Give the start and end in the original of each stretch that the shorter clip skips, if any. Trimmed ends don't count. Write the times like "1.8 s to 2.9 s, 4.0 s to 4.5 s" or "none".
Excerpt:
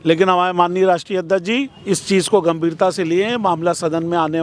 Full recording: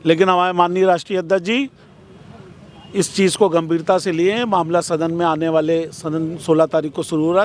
1.8 s to 2.8 s

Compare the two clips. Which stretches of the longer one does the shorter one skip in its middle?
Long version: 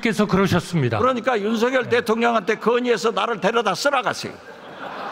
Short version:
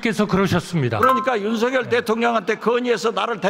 none

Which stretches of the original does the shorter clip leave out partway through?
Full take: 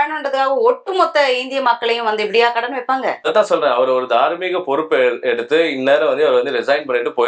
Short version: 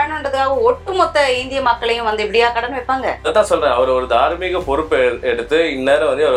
none

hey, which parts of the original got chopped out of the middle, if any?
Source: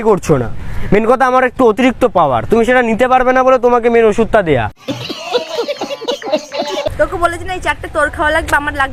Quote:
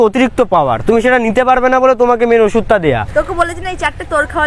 4.7 s to 6.9 s

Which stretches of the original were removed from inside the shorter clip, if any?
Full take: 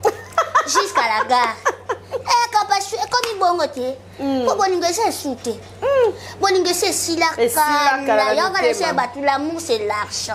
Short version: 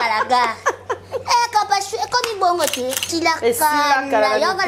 4.1 s to 7.0 s

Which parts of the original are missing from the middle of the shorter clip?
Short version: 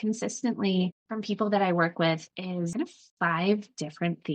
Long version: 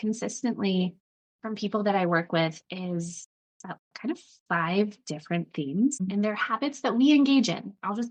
1.1 s to 1.4 s, 3.0 s to 4.0 s

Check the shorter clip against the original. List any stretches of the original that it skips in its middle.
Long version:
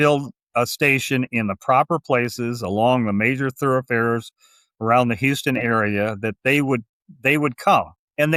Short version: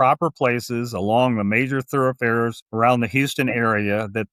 4.3 s to 4.7 s

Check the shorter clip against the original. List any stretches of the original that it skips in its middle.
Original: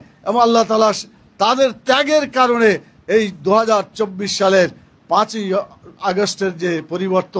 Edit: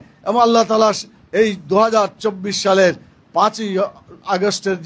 1.2 s to 2.9 s

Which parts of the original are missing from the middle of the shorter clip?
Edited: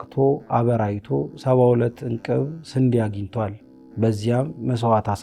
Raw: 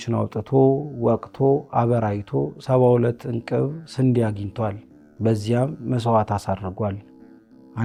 none

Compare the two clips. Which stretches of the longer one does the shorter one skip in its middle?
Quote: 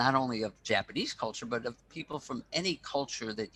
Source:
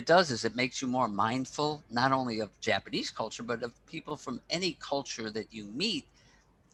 none

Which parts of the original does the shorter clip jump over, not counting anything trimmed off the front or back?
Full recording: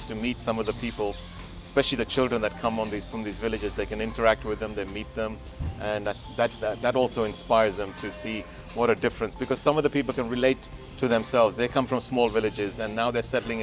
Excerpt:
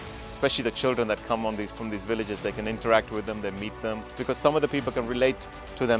5.5 s to 9.4 s

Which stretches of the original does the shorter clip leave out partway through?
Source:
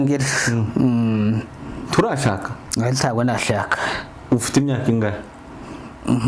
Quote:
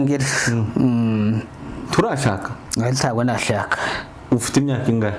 none

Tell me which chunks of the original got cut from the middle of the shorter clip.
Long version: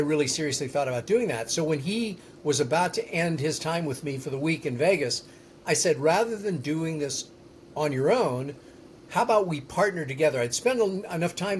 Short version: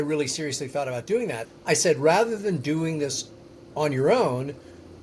1.4 s to 5.4 s

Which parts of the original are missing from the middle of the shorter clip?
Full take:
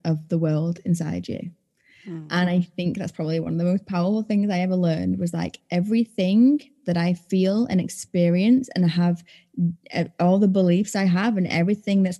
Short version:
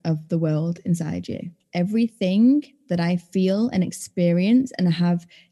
1.6 s to 5.6 s

